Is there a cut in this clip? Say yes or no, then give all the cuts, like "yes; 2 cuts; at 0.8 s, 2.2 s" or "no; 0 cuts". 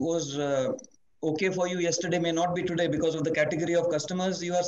no; 0 cuts